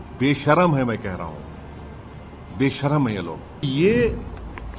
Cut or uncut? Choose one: cut